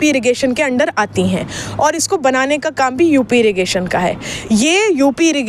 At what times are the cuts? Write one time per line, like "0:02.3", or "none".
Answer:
0:04.3